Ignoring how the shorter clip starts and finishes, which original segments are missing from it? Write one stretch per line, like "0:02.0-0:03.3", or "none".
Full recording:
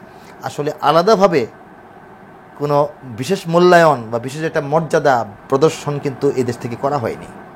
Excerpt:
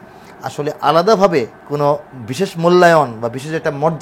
0:01.6-0:02.5